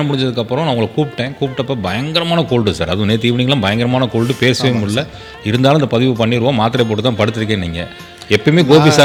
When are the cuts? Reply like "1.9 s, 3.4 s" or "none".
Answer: none